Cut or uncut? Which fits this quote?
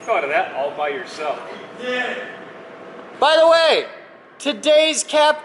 cut